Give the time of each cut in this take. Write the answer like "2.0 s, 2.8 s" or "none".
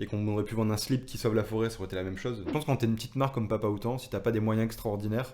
2.4 s